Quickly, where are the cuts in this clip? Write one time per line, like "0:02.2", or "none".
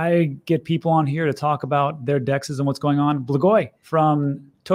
0:03.8